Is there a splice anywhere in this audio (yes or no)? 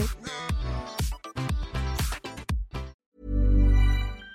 yes